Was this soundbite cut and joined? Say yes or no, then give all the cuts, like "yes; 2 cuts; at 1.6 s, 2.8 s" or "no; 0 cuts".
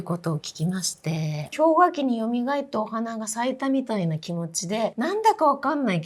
yes; 2 cuts; at 1.4 s, 4.9 s